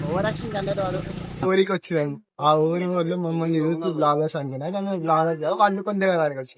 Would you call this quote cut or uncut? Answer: cut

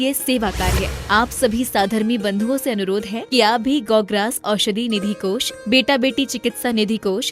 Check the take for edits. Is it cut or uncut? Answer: cut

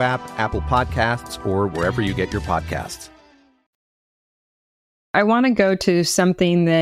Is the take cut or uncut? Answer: uncut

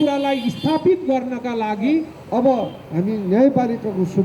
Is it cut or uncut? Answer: cut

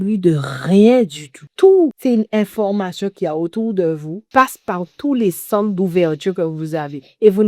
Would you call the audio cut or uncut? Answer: cut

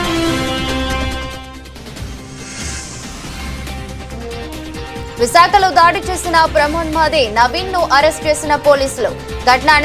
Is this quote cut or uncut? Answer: cut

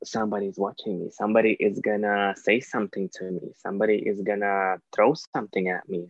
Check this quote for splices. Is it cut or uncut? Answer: uncut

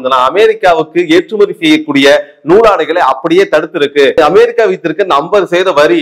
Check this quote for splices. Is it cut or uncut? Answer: cut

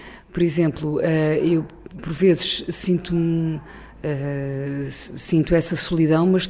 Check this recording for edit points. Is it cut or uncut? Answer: uncut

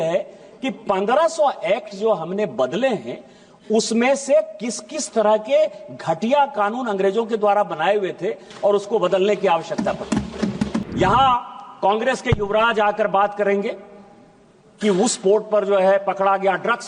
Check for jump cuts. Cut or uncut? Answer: cut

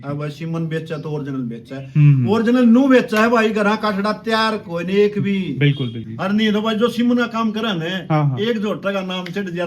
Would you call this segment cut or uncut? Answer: cut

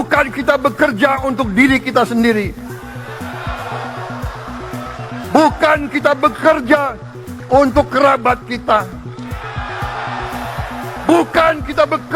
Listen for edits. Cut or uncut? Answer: uncut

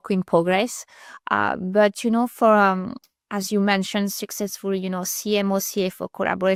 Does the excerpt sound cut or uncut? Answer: uncut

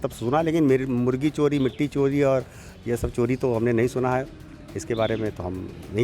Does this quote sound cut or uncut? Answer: uncut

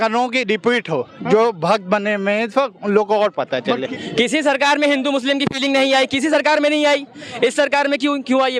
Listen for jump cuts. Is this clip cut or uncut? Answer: cut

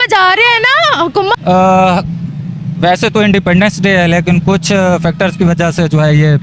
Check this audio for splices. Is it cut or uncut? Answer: cut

